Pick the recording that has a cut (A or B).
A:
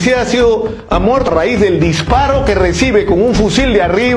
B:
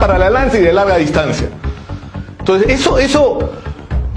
A